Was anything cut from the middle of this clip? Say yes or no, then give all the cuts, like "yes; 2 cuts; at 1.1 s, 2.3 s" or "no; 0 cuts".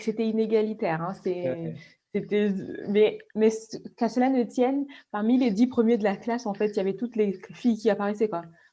no; 0 cuts